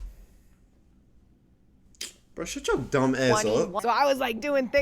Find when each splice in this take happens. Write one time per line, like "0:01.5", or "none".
0:03.8